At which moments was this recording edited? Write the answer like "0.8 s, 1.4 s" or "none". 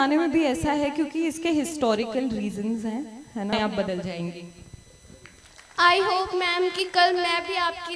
3.5 s